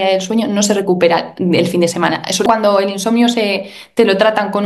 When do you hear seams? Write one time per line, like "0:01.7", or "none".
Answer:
0:02.5